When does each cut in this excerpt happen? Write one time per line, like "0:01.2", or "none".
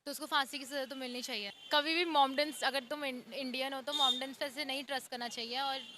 0:01.6